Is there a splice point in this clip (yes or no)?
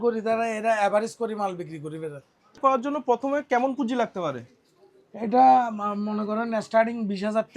yes